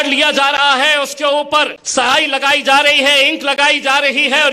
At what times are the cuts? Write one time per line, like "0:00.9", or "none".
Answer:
0:01.8